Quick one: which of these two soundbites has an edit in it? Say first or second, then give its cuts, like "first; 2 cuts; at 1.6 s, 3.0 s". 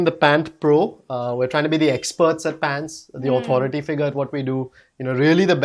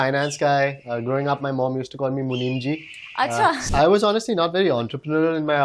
second; 1 cut; at 3.7 s